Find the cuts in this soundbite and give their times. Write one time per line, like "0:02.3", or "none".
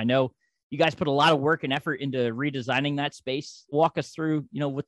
0:03.7

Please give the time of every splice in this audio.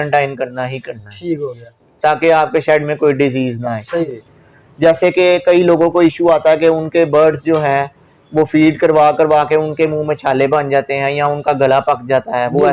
0:04.1

